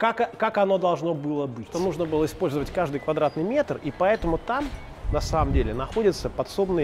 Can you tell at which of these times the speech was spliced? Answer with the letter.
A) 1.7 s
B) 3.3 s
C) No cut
A